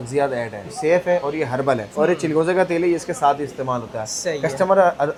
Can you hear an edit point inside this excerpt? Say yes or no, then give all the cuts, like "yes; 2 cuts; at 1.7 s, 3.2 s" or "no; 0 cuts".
no; 0 cuts